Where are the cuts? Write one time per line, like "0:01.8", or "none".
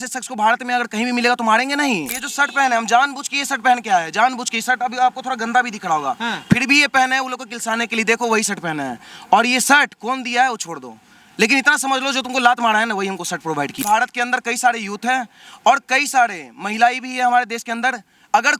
0:02.2
0:13.8